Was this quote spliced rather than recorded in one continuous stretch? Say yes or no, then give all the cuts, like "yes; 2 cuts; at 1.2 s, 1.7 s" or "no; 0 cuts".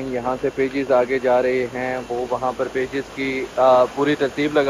no; 0 cuts